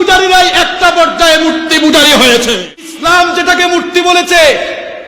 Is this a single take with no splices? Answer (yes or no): no